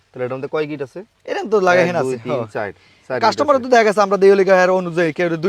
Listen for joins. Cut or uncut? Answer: uncut